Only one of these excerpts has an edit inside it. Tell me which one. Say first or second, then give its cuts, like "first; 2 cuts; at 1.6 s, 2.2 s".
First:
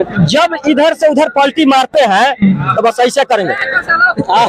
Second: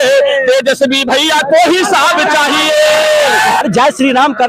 second; 1 cut; at 3.6 s